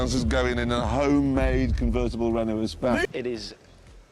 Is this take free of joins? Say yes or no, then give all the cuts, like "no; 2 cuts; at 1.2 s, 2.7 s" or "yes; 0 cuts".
no; 1 cut; at 3.1 s